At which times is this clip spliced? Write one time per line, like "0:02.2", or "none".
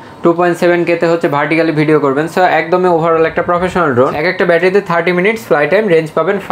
0:04.2